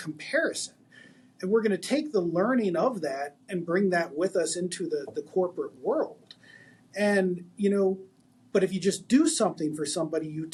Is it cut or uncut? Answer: uncut